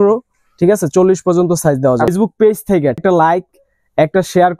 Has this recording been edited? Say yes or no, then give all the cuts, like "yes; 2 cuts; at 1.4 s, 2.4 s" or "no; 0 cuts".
yes; 2 cuts; at 2.1 s, 3.0 s